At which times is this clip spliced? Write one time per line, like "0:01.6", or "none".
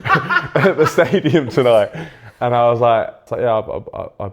0:03.2